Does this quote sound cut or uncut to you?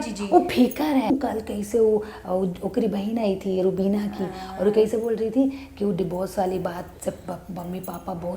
cut